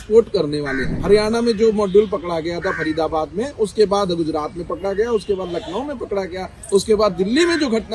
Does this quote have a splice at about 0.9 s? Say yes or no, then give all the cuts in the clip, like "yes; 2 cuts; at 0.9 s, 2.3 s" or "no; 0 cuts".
yes; 1 cut; at 0.9 s